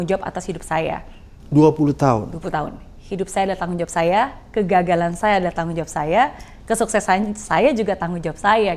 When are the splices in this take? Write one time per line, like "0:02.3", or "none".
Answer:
none